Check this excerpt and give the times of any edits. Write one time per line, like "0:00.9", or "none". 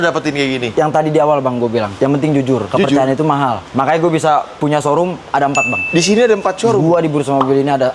0:00.7
0:03.6